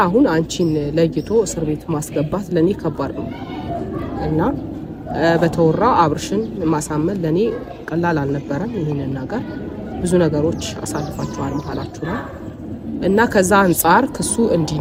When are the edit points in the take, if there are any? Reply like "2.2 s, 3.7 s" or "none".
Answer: none